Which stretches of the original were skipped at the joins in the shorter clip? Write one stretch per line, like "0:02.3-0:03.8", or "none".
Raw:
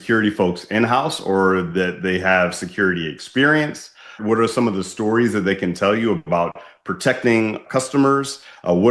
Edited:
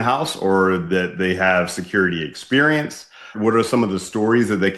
none